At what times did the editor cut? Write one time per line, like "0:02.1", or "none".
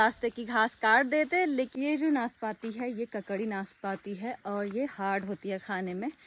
0:01.7